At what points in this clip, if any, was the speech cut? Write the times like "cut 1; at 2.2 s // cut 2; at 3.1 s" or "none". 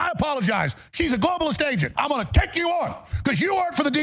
cut 1; at 1.9 s